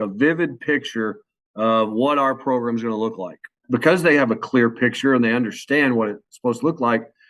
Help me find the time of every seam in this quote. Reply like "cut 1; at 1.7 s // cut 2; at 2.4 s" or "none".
cut 1; at 3.6 s

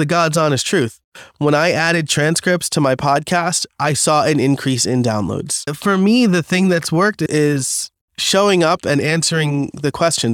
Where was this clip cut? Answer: cut 1; at 5.6 s

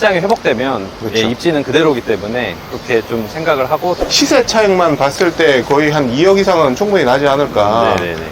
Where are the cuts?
cut 1; at 4.0 s

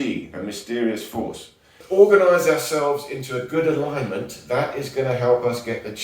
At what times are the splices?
cut 1; at 1.8 s

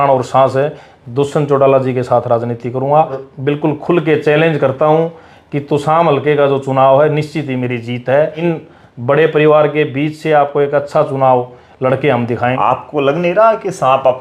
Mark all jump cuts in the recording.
cut 1; at 3.3 s // cut 2; at 8.4 s // cut 3; at 12.6 s

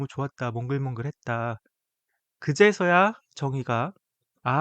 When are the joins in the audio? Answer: none

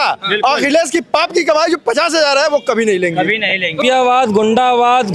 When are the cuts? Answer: cut 1; at 3.8 s

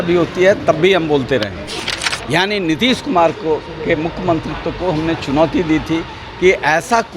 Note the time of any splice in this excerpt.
cut 1; at 1.7 s

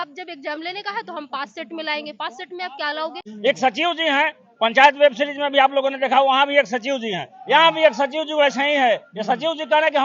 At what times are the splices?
cut 1; at 3.3 s

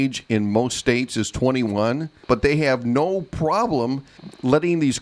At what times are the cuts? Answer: cut 1; at 2.2 s

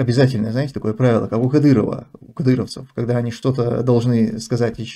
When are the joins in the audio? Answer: none

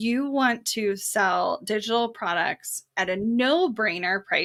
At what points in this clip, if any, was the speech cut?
none

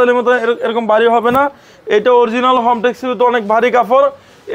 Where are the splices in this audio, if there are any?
none

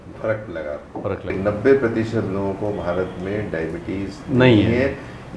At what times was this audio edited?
cut 1; at 1.3 s

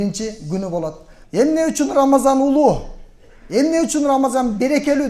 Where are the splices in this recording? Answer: cut 1; at 1.1 s

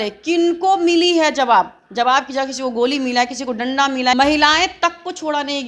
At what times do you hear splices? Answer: cut 1; at 4.1 s

